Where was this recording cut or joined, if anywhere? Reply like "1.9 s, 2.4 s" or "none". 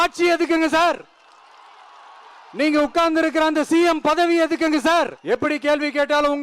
5.2 s